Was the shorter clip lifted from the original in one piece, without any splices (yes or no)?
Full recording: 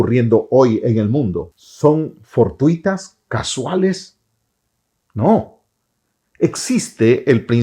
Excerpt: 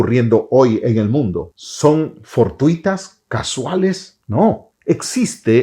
no